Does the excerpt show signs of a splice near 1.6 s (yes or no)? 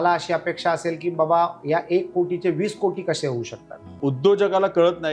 no